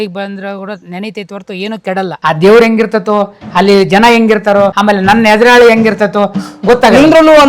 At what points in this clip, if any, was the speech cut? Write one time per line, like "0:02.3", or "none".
0:02.2